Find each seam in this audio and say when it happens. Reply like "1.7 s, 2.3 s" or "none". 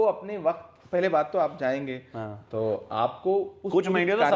none